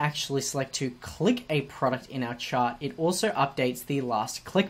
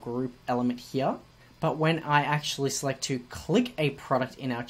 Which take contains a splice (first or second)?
second